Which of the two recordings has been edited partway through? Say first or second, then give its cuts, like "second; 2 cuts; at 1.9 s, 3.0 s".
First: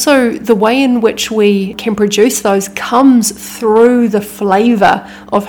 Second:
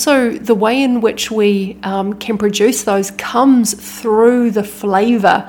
first; 1 cut; at 1.7 s